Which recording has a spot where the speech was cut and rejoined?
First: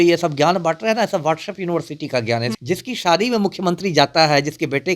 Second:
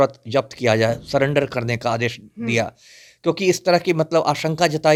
first; 1 cut; at 2.5 s

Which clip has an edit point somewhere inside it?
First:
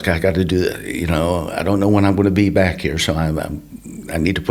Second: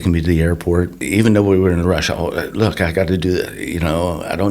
second; 1 cut; at 1.0 s

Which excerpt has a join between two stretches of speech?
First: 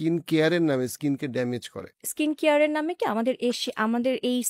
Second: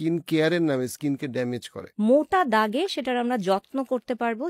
second; 1 cut; at 1.8 s

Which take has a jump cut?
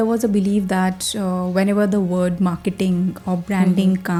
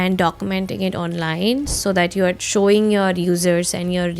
second; 1 cut; at 2.4 s

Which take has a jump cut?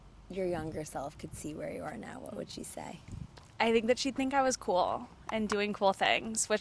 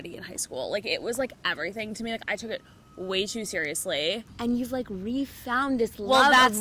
second; 1 cut; at 4.3 s

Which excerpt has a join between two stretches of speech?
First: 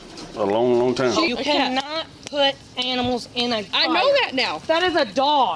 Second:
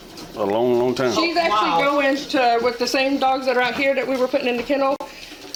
first; 2 cuts; at 1.3 s, 4.6 s

